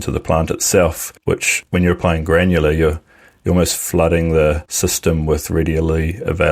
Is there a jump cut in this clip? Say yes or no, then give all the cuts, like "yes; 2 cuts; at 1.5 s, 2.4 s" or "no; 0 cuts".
yes; 2 cuts; at 1.5 s, 4.7 s